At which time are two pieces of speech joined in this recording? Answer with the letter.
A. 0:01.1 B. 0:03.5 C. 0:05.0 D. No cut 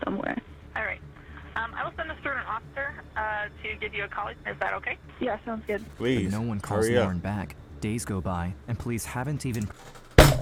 D